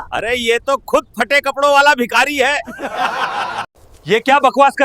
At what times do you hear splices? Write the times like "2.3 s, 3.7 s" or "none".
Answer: 3.7 s